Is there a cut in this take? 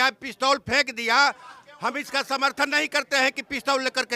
no; 0 cuts

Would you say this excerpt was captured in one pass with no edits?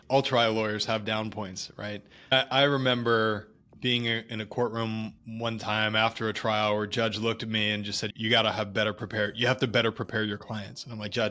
no; 2 cuts; at 2.3 s, 8.1 s

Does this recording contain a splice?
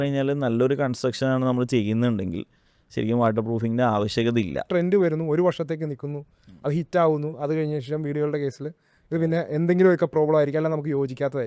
yes; 1 cut; at 4.7 s

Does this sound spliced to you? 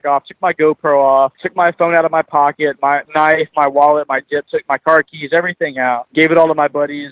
yes; 3 cuts; at 1.4 s, 3.0 s, 6.1 s

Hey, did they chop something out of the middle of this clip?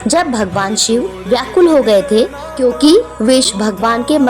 no; 0 cuts

